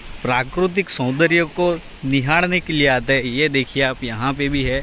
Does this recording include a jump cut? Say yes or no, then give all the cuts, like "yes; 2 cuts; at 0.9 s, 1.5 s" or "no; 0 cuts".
no; 0 cuts